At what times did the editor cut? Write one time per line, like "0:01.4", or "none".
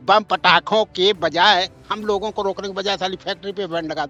none